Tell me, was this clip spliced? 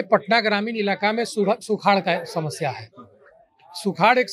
no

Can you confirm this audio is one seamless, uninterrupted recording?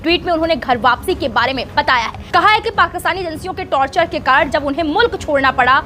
yes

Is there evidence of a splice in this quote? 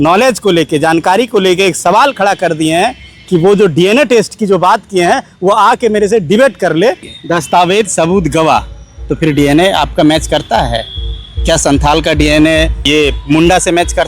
yes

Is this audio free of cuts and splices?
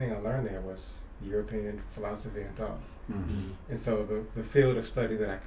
yes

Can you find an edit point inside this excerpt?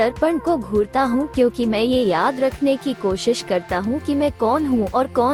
no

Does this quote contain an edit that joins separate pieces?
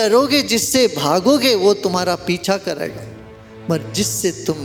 no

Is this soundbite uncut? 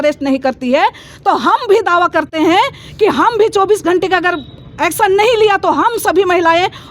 yes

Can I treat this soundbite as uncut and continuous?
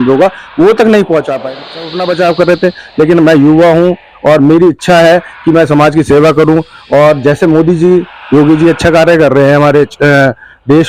no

